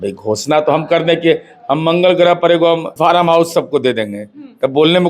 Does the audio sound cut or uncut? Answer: cut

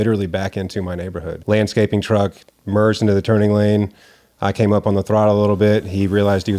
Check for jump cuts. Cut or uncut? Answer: cut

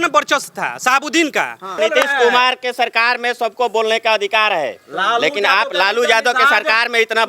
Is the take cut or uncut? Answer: cut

